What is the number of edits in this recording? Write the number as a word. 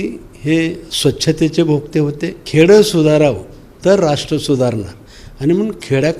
two